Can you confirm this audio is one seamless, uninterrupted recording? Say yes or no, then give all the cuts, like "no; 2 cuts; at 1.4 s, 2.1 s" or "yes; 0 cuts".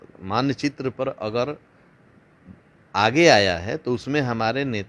yes; 0 cuts